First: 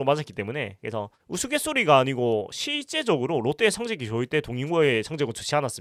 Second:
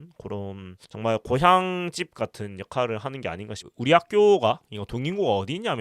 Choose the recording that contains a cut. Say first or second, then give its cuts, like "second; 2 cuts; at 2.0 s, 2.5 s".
second; 1 cut; at 3.7 s